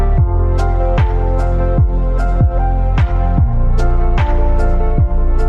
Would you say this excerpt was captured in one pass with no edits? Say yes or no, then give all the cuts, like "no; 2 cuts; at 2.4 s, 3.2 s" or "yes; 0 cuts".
yes; 0 cuts